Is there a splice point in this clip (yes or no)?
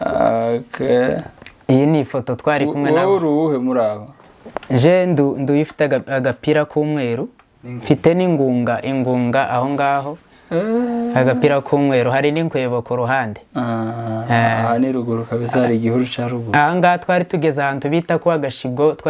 no